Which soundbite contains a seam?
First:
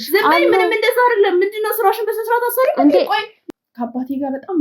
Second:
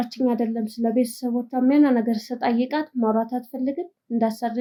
first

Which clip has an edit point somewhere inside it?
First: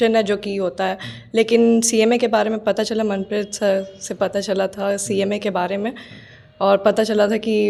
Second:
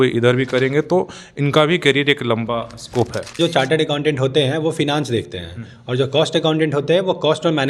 second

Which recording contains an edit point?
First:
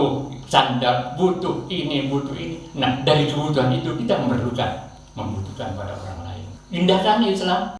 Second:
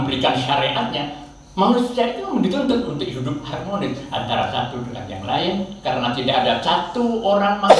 first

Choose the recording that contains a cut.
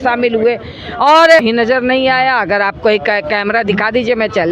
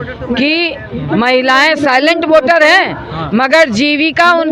first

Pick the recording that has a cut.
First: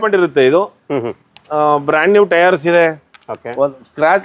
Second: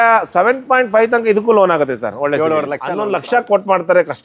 second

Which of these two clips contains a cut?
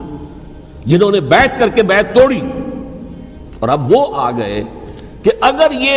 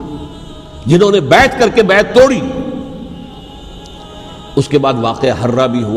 second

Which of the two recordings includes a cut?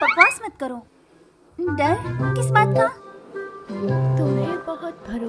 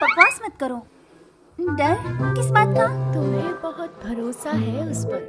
second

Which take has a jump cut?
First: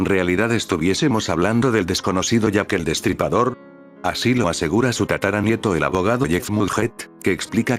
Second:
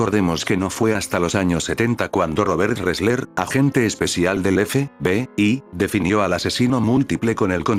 first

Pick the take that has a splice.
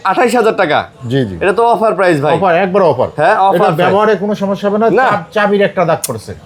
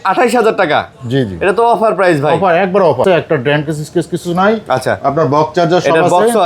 second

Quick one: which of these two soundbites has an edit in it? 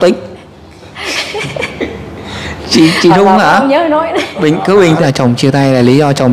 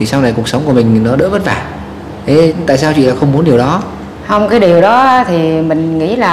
first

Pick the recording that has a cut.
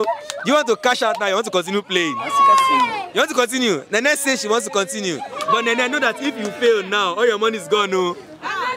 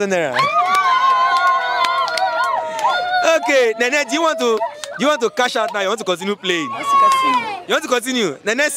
first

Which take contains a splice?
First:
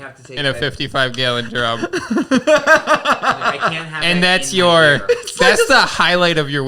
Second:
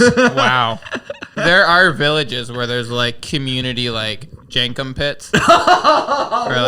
second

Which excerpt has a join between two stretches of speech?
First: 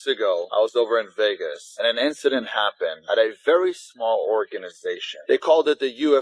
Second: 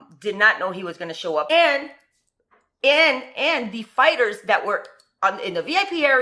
second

